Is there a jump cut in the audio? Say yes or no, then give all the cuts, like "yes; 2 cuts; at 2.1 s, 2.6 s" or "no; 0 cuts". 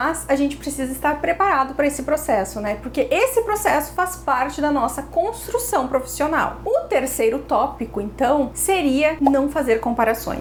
no; 0 cuts